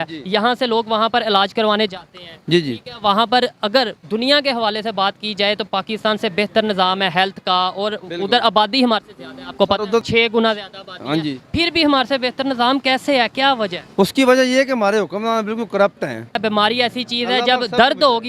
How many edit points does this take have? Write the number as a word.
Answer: two